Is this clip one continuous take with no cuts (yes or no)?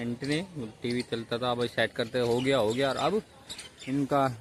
yes